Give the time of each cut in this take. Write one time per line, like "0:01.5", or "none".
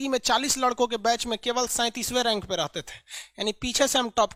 none